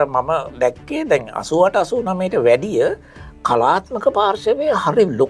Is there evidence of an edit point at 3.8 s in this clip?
no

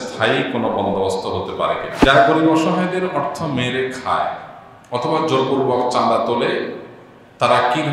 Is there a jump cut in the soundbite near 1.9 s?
yes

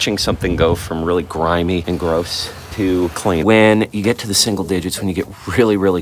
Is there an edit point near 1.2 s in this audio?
no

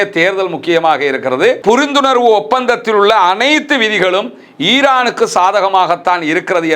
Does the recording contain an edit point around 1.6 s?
yes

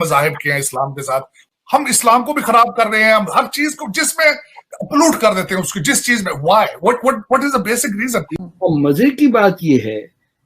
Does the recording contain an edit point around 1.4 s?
yes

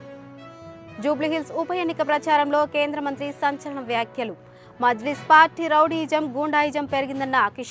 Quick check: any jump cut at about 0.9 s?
yes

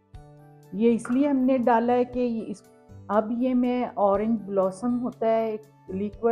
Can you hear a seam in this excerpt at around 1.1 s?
no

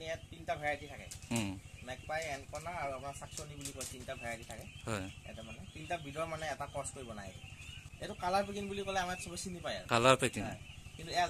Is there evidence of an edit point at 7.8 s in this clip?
yes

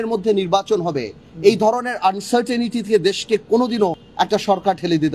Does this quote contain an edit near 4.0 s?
yes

